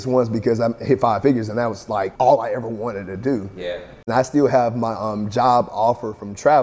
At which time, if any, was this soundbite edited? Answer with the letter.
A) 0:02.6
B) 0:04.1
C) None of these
B